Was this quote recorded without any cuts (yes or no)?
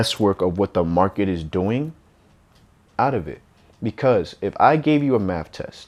yes